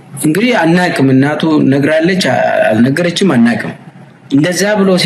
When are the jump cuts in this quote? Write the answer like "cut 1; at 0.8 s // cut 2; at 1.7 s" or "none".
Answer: none